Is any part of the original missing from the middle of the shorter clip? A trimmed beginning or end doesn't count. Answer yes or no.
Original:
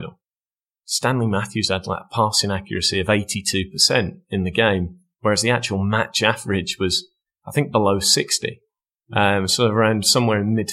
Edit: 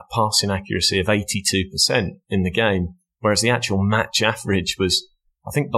no